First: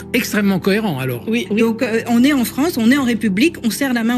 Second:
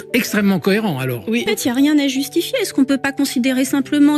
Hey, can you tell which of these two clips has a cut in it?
first; 1 cut; at 1.4 s

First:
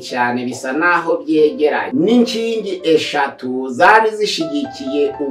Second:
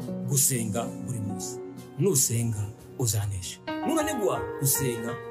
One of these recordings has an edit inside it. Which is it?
first; 1 cut; at 1.8 s

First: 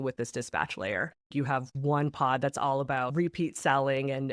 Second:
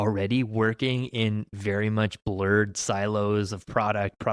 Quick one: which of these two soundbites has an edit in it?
first; 2 cuts; at 1.3 s, 3.1 s

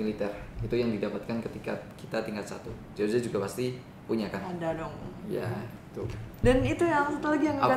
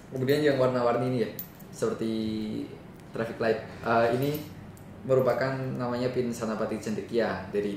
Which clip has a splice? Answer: first; 1 cut; at 6.2 s

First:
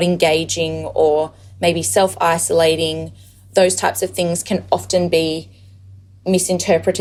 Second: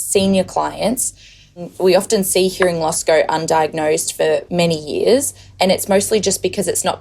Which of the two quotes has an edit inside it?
second; 1 cut; at 1.7 s

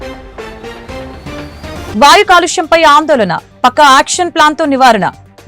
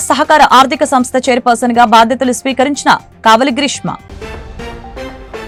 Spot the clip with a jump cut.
first; 1 cut; at 1.8 s

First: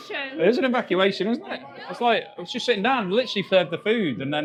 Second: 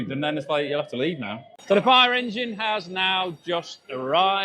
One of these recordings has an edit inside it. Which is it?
second; 1 cut; at 1.5 s

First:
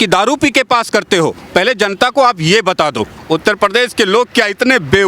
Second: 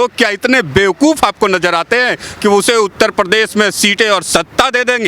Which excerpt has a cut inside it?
first; 1 cut; at 3.2 s

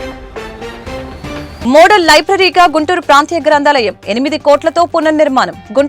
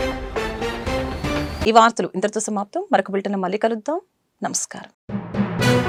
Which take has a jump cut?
first; 1 cut; at 1.6 s

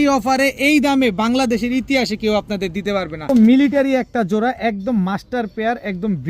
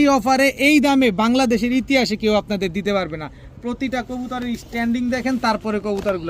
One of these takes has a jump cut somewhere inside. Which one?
first; 1 cut; at 3.3 s

